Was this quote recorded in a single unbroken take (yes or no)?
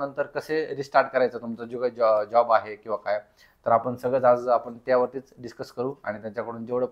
yes